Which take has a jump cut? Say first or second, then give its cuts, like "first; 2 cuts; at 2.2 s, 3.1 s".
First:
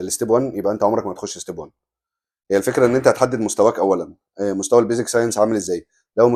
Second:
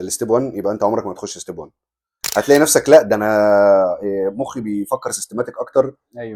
second; 1 cut; at 2.1 s